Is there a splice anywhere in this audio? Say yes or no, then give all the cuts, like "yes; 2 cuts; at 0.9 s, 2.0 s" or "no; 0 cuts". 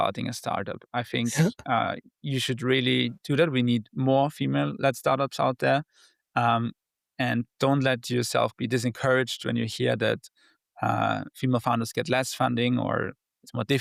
no; 0 cuts